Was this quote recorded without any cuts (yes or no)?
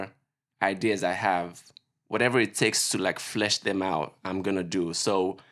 yes